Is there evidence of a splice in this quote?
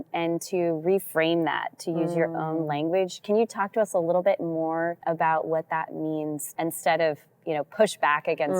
yes; 2 cuts; at 5.0 s, 6.5 s

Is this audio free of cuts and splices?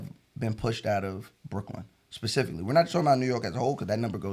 yes; 0 cuts

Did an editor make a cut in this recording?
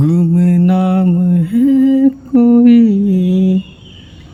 no; 0 cuts

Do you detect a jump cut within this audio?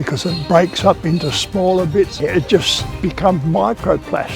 yes; 1 cut; at 2.2 s

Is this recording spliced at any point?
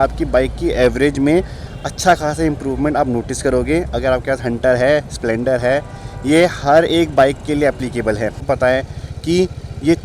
yes; 1 cut; at 8.4 s

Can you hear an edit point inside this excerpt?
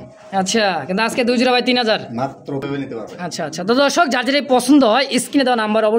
yes; 1 cut; at 2.7 s

